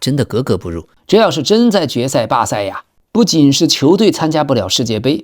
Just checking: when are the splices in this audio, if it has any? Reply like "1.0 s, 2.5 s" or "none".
0.9 s